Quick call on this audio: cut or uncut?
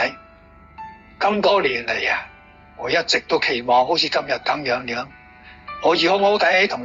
uncut